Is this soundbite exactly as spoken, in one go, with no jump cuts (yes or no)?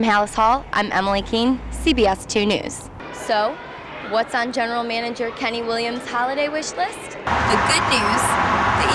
no